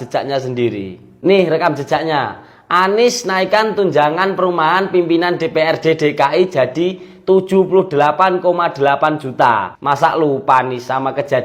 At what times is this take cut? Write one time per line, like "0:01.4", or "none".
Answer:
0:09.7